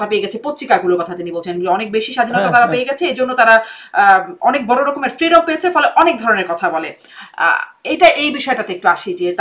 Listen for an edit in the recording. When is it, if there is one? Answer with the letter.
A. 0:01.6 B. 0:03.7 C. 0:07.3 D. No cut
D